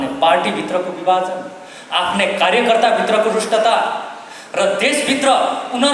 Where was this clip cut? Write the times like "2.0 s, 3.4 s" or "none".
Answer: none

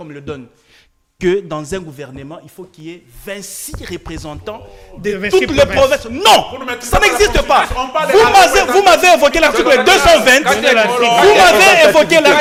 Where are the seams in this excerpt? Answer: none

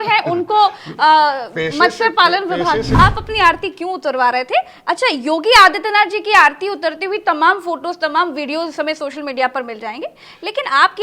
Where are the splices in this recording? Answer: 2.9 s

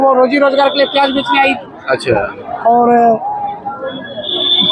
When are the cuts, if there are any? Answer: none

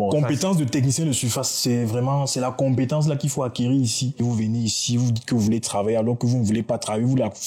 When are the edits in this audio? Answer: 4.2 s

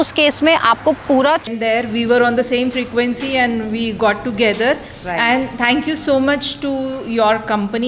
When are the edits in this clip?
1.5 s

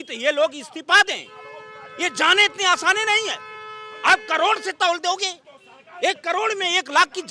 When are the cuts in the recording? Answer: none

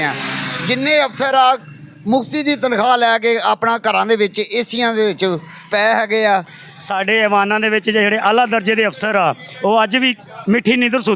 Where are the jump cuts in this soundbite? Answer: 6.2 s

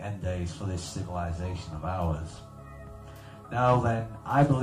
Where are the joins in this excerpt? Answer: 3.3 s

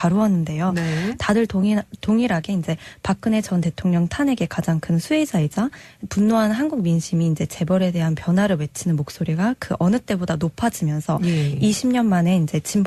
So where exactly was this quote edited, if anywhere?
8.1 s

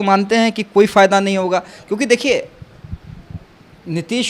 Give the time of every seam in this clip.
none

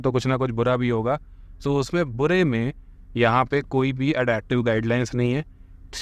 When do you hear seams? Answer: none

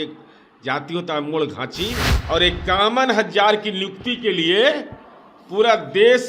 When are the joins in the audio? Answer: 2.1 s

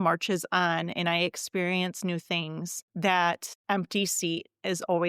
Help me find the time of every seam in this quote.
2.8 s, 3.5 s

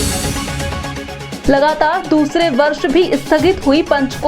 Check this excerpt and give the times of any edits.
1.3 s

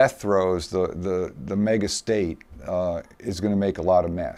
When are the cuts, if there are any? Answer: none

